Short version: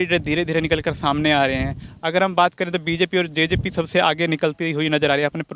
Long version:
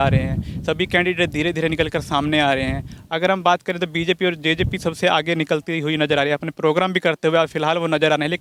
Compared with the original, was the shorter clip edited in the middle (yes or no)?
no